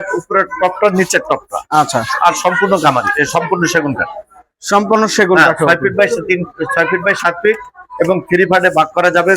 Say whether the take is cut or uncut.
uncut